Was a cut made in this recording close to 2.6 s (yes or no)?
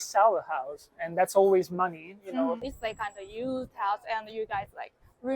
yes